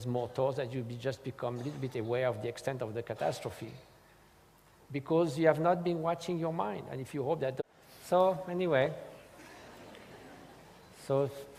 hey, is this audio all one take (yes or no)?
yes